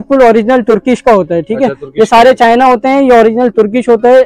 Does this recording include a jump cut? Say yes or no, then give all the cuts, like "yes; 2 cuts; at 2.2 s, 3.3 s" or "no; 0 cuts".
no; 0 cuts